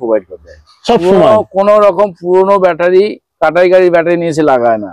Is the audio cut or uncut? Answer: uncut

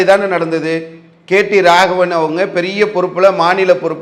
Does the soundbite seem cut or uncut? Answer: uncut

